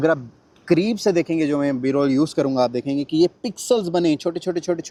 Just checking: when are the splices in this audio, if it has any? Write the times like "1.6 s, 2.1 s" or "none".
none